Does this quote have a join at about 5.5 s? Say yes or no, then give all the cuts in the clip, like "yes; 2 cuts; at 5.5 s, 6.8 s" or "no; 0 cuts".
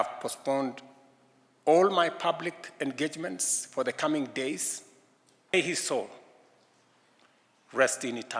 yes; 1 cut; at 5.5 s